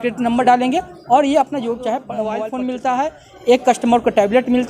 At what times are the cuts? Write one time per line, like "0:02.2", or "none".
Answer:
0:02.1